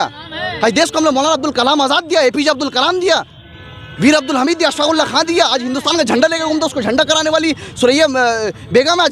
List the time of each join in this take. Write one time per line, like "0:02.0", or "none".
none

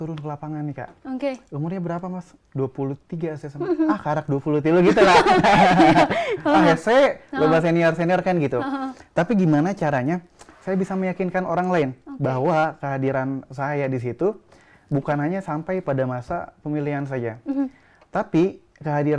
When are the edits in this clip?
none

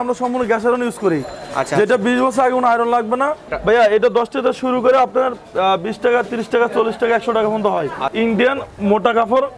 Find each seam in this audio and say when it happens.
0:03.5
0:08.0

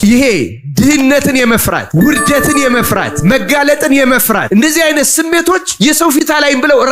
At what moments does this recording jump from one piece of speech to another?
0:01.4
0:03.1
0:04.5
0:06.2

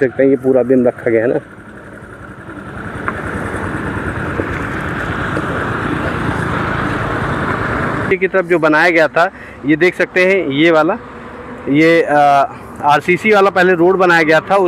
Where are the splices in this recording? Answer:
0:08.0

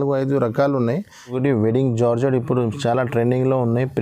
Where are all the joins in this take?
0:01.4

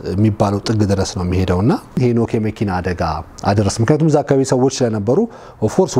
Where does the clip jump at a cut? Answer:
0:02.0

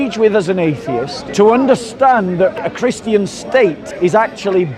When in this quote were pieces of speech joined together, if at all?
0:01.2
0:02.6
0:03.8

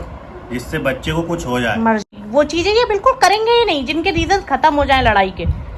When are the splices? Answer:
0:02.1

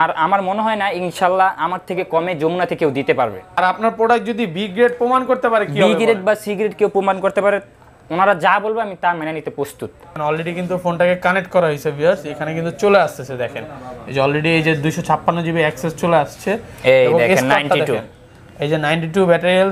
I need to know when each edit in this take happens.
0:03.6
0:10.1

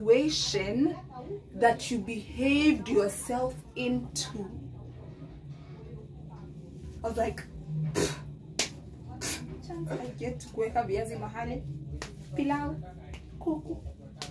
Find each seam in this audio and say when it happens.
0:10.0

